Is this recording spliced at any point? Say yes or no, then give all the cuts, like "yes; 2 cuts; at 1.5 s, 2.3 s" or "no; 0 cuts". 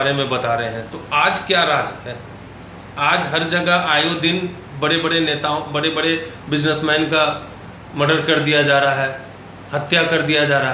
no; 0 cuts